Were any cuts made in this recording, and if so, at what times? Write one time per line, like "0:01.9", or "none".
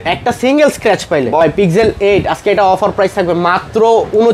0:01.4